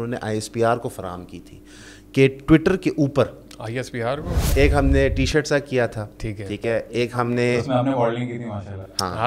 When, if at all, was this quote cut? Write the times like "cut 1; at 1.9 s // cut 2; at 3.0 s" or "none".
cut 1; at 4.5 s

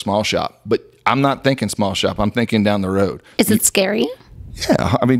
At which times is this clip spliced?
cut 1; at 3.2 s

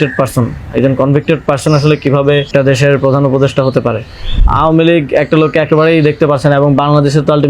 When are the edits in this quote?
cut 1; at 2.5 s // cut 2; at 4.4 s

